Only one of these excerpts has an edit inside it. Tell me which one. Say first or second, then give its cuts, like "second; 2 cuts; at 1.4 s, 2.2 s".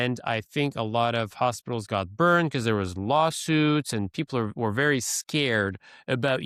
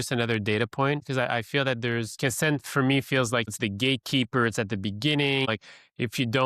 second; 4 cuts; at 1.0 s, 2.2 s, 3.5 s, 5.5 s